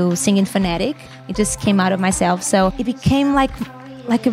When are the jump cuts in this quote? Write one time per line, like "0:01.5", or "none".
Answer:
0:02.8